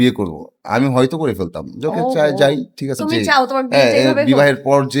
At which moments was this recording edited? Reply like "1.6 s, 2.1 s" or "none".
3.0 s